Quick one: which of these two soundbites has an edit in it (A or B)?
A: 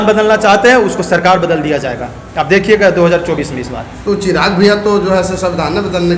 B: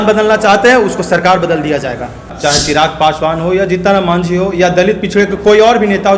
B